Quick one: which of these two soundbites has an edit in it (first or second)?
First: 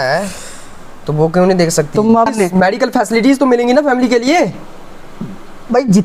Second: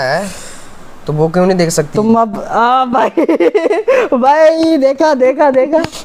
first